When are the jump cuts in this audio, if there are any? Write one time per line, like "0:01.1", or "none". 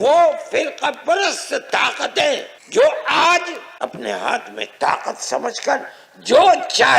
0:02.5
0:03.6